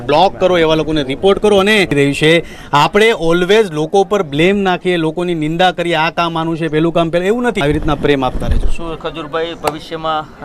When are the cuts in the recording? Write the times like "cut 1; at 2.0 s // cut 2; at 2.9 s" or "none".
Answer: cut 1; at 1.9 s // cut 2; at 7.6 s